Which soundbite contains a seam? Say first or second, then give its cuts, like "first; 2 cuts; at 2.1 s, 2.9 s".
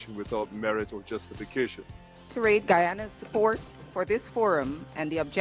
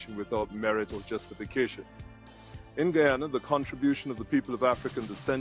first; 1 cut; at 2.3 s